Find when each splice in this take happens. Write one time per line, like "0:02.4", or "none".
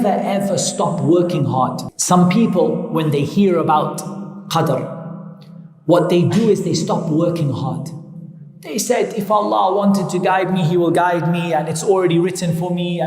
0:01.9